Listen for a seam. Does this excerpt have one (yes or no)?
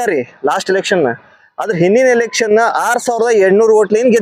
no